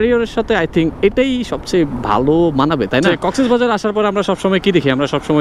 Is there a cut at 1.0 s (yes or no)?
no